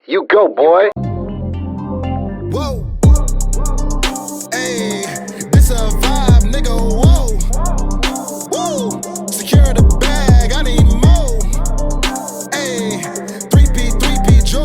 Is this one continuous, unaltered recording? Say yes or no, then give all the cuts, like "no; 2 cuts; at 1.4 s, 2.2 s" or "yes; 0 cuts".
no; 1 cut; at 0.9 s